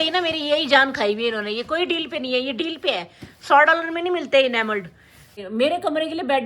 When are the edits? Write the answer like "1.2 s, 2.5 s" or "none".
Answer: 5.4 s